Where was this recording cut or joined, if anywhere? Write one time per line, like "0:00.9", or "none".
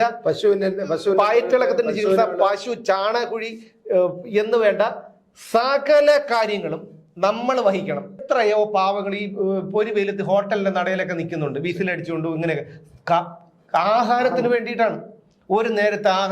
0:08.2